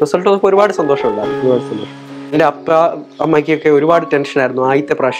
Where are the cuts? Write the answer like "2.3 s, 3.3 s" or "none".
2.3 s